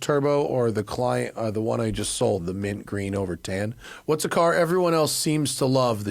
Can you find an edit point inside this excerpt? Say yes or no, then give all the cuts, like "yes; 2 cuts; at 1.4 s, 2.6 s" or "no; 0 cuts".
yes; 1 cut; at 3.9 s